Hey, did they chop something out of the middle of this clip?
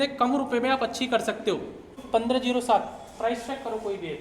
yes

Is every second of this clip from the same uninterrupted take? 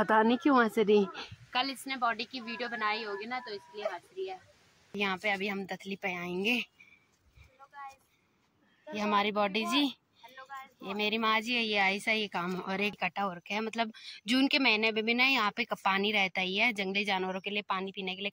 no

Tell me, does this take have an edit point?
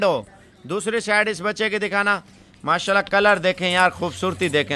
no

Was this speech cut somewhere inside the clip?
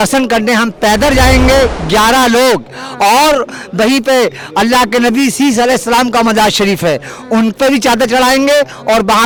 no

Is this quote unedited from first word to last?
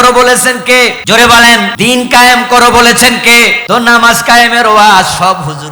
no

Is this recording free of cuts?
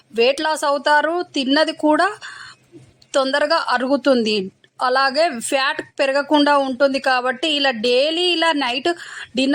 yes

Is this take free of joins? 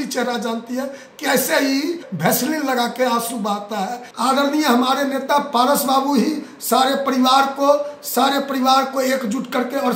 no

